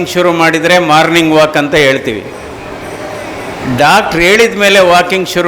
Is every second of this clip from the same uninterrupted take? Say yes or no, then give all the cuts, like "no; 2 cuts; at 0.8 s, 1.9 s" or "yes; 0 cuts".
yes; 0 cuts